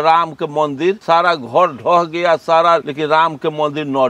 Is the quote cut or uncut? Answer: cut